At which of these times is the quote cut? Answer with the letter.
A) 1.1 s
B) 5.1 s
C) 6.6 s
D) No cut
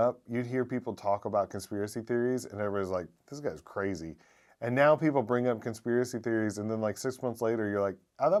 D